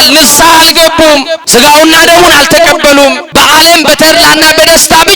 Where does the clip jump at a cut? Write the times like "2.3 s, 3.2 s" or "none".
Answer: 1.4 s, 3.2 s